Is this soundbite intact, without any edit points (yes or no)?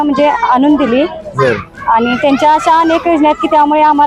yes